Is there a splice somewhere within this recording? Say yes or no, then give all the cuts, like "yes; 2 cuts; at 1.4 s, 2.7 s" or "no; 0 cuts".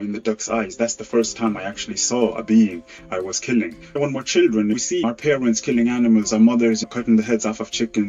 no; 0 cuts